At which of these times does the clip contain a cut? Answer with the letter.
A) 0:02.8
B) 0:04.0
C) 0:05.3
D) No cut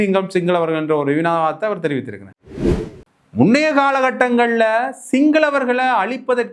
A